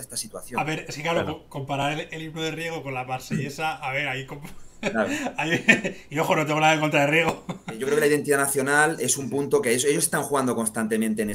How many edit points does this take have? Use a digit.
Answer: 1